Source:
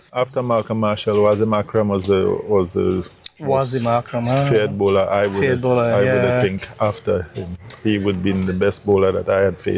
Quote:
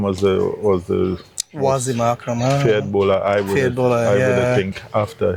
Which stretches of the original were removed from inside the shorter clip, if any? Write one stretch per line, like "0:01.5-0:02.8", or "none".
none